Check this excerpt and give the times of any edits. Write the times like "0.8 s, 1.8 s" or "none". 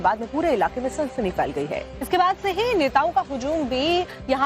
3.1 s

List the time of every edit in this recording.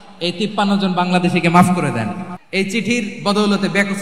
2.3 s

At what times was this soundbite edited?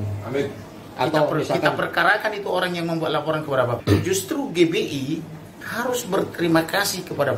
3.8 s

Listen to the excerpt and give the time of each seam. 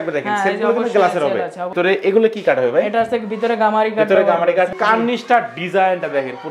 1.7 s, 4.7 s

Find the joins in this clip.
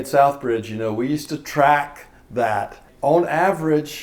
2.9 s

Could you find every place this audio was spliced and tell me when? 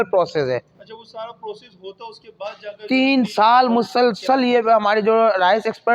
none

